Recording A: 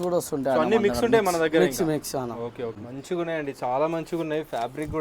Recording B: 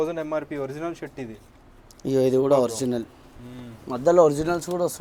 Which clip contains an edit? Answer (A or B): A